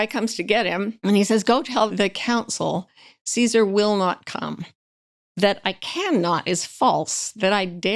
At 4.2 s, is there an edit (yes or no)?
no